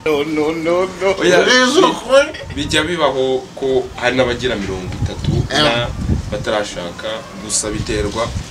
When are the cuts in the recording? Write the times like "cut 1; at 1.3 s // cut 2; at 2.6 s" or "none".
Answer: cut 1; at 1.2 s